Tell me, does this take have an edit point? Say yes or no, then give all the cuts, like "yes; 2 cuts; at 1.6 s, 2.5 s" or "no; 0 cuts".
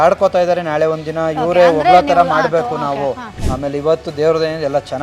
yes; 1 cut; at 3.3 s